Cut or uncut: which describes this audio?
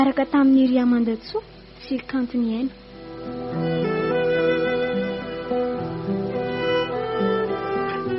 uncut